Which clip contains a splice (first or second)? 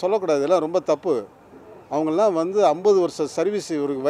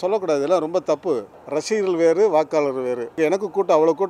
second